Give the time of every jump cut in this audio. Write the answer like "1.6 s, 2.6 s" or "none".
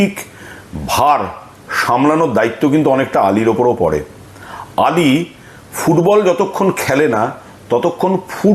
none